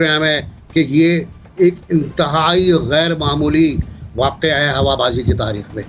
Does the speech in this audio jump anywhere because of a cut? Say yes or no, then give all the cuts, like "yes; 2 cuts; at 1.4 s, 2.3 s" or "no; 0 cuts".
no; 0 cuts